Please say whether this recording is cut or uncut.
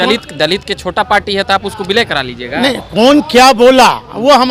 uncut